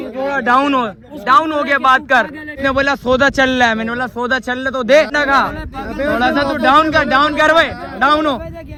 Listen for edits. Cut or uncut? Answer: uncut